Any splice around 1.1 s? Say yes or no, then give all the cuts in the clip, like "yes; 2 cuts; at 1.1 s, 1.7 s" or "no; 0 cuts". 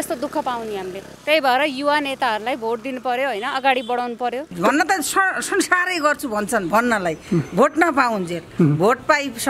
yes; 2 cuts; at 1.1 s, 4.5 s